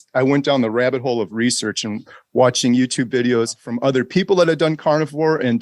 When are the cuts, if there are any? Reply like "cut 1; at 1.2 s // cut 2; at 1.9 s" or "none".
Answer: cut 1; at 3.6 s